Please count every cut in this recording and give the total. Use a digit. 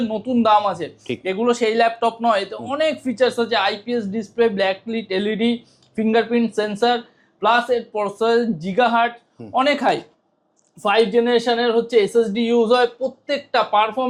0